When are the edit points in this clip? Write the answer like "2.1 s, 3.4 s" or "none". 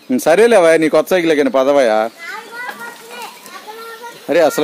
3.6 s